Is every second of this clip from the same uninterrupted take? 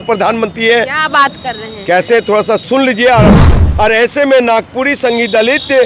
no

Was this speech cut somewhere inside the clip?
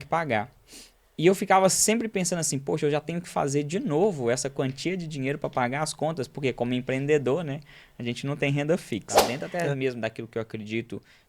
yes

